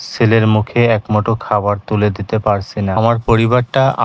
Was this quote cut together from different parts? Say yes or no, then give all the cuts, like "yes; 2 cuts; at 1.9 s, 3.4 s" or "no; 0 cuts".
yes; 1 cut; at 3.0 s